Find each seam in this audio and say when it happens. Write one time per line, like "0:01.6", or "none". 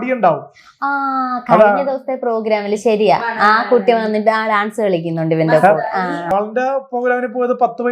0:06.3